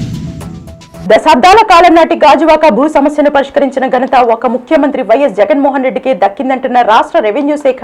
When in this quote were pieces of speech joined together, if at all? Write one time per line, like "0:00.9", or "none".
0:01.0